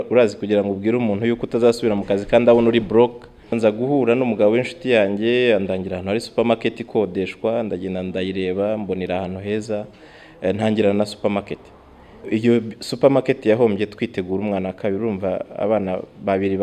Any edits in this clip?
yes; 2 cuts; at 3.6 s, 12.3 s

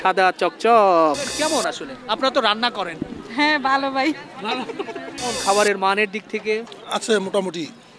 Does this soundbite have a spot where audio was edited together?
yes; 2 cuts; at 1.3 s, 5.4 s

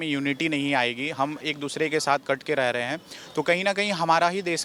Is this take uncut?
yes; 0 cuts

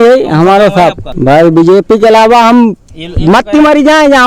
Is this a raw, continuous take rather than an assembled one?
no; 1 cut; at 1.1 s

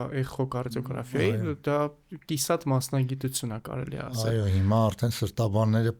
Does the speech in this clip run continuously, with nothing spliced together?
yes; 0 cuts

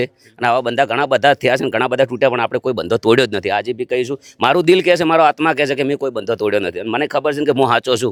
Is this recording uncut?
yes; 0 cuts

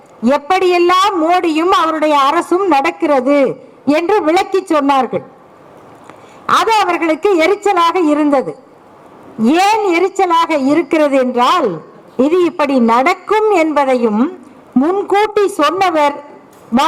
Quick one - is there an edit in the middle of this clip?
no; 0 cuts

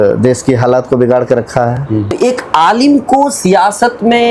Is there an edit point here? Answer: yes; 1 cut; at 2.1 s

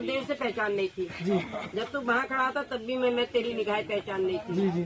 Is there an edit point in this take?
no; 0 cuts

